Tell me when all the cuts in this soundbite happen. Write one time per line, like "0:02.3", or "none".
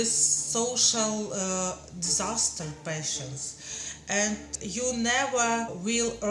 none